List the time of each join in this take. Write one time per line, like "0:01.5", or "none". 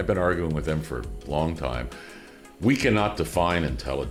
none